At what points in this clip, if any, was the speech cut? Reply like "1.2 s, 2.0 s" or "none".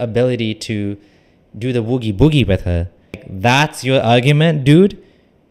3.3 s